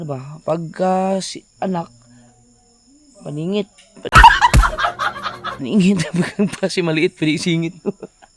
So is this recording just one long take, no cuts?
yes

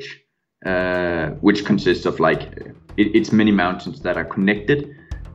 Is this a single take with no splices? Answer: yes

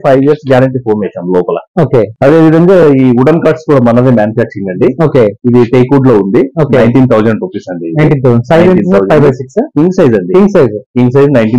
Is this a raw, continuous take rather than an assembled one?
yes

